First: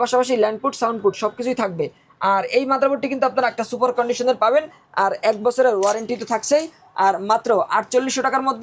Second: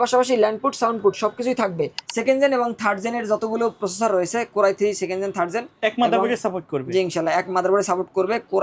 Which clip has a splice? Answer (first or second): second